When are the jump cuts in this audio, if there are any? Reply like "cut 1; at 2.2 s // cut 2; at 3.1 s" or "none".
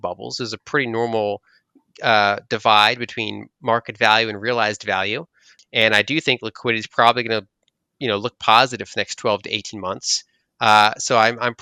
cut 1; at 5.5 s

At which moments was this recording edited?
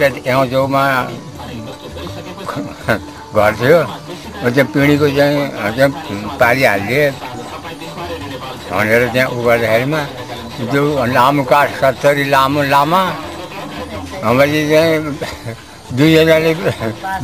none

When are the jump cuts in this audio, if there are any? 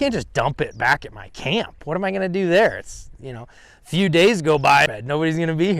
cut 1; at 4.9 s

